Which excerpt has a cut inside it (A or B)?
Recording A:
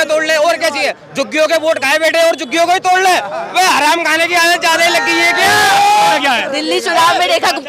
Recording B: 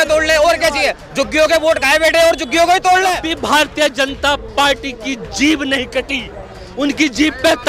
B